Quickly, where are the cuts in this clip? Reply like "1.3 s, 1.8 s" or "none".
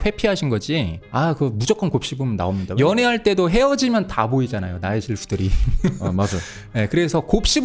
2.7 s